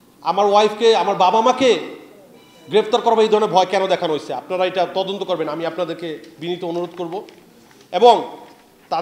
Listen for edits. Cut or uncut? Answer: uncut